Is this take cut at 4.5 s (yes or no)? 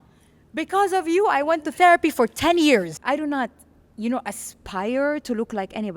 no